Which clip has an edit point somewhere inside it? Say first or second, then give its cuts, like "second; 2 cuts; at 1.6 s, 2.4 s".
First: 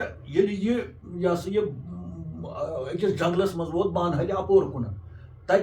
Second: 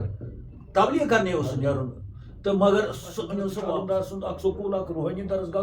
second; 1 cut; at 3.6 s